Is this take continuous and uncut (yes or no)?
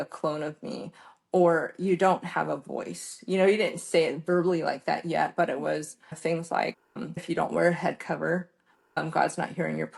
no